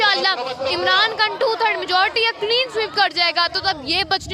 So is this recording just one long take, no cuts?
yes; 0 cuts

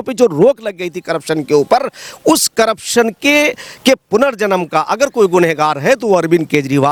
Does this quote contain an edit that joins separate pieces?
no; 0 cuts

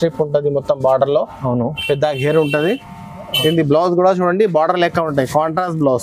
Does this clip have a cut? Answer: no; 0 cuts

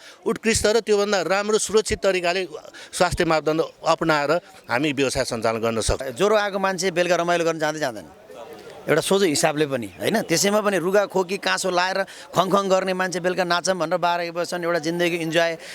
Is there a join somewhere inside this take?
yes; 1 cut; at 6.1 s

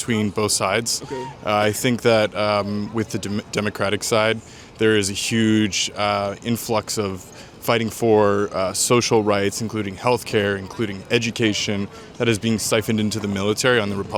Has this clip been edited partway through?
no; 0 cuts

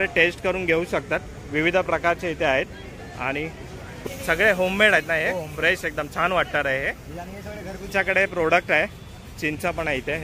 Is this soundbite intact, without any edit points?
no; 2 cuts; at 3.9 s, 7.9 s

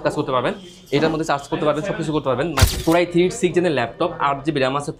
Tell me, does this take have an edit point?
yes; 1 cut; at 2.7 s

